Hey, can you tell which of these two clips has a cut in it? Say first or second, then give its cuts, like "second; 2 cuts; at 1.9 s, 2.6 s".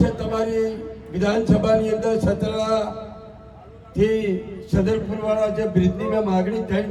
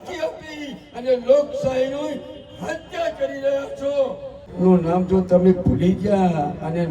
second; 1 cut; at 4.4 s